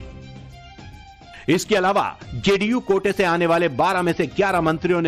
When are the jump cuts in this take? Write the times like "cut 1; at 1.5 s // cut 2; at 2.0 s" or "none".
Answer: none